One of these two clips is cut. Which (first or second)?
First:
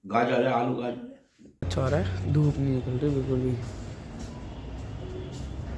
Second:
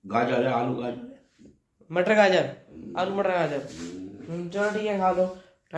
first